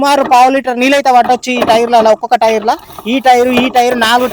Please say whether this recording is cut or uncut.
uncut